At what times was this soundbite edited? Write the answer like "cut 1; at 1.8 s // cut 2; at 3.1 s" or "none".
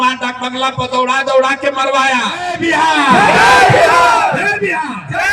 cut 1; at 2.5 s